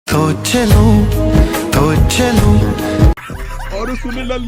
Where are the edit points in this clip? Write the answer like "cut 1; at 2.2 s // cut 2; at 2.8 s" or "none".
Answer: cut 1; at 3.1 s